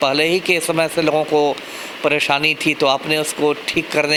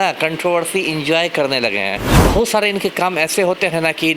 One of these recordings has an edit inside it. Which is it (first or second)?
second